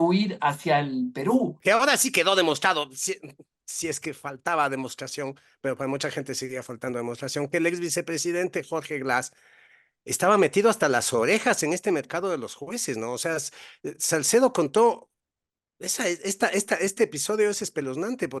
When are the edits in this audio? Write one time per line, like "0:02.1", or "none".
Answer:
0:01.6